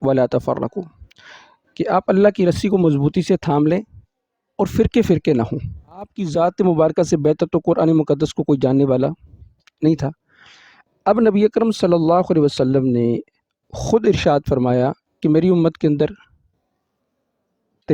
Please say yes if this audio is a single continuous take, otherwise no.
no